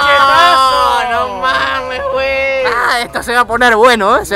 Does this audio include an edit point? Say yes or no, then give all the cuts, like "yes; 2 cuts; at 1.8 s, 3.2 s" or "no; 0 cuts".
no; 0 cuts